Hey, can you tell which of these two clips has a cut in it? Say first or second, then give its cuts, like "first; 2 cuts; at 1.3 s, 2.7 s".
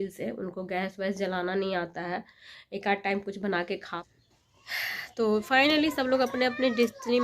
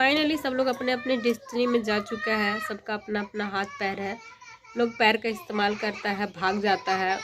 first; 1 cut; at 4.0 s